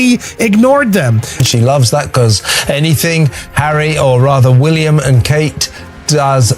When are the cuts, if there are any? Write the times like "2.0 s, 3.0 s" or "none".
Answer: 1.4 s